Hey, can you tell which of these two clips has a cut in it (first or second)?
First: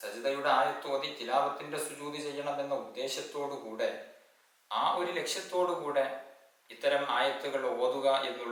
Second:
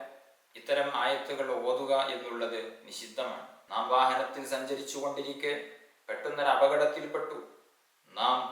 second